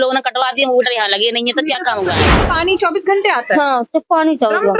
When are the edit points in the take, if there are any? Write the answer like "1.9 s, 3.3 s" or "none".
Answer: 2.3 s